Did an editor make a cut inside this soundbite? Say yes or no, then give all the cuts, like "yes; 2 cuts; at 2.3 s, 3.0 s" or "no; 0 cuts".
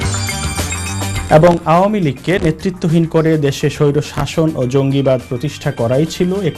yes; 1 cut; at 1.2 s